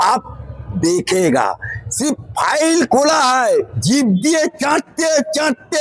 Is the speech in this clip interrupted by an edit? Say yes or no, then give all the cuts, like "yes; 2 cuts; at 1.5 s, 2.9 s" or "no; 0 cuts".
yes; 1 cut; at 3.8 s